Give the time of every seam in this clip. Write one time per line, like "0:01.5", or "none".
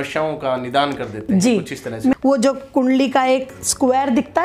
0:02.1